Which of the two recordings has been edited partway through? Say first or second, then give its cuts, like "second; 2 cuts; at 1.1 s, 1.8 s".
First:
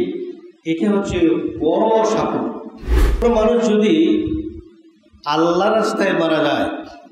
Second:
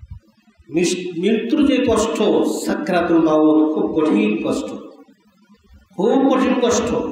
first; 1 cut; at 3.2 s